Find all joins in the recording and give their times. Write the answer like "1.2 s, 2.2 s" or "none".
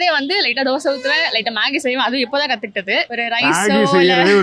3.1 s